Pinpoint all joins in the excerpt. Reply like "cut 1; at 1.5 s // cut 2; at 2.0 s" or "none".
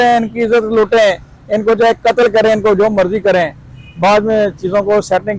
none